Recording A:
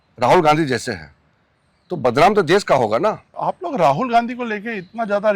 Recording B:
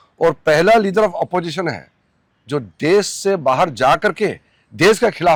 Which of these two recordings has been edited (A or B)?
A